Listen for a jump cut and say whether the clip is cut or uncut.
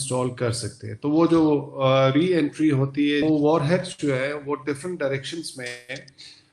cut